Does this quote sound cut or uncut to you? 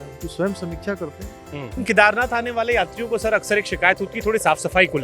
cut